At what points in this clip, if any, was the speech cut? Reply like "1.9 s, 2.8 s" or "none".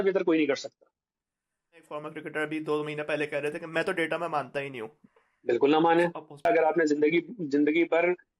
2.0 s, 4.9 s, 6.5 s